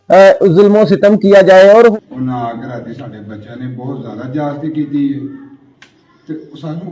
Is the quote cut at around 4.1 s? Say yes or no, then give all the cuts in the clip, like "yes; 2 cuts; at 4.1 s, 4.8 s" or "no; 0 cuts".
no; 1 cut; at 1.9 s